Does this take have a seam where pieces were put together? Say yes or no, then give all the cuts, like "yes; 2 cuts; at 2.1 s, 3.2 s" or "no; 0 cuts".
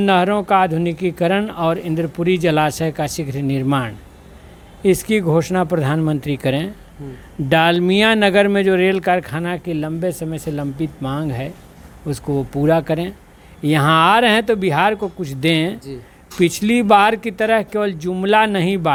no; 0 cuts